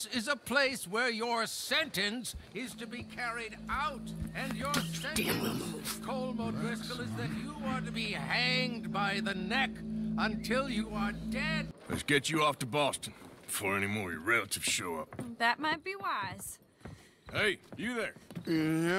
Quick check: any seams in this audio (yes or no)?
yes